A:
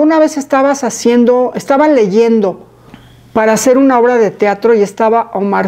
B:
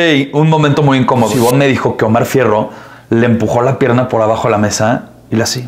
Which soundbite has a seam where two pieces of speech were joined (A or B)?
B